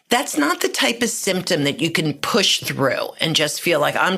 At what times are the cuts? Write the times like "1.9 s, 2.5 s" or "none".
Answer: none